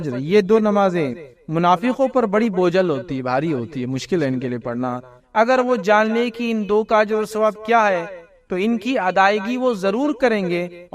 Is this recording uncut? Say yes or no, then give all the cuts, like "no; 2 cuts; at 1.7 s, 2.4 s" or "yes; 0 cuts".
yes; 0 cuts